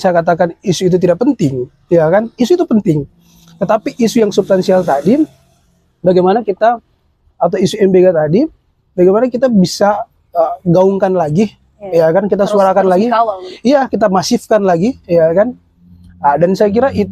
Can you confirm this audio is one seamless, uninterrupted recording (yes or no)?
yes